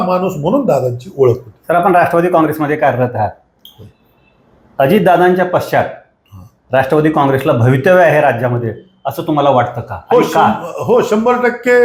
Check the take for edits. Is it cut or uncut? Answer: uncut